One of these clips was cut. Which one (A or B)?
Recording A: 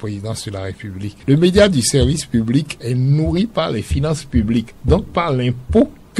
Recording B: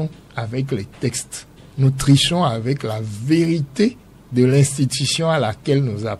A